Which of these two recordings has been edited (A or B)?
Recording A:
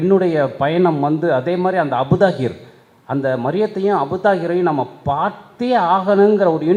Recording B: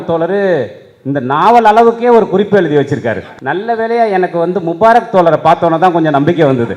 B